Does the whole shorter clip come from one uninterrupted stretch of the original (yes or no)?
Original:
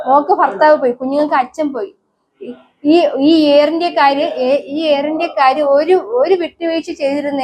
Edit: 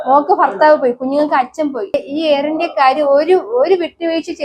no